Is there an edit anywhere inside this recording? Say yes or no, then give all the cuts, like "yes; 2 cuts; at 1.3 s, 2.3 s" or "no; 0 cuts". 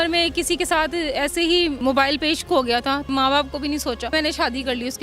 yes; 3 cuts; at 1.8 s, 3.1 s, 4.1 s